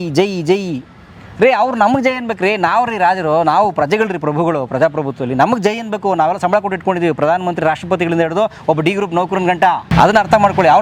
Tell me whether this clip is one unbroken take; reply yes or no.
no